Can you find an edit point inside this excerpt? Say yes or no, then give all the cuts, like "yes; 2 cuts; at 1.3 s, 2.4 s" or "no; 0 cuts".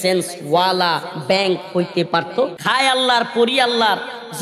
yes; 1 cut; at 2.6 s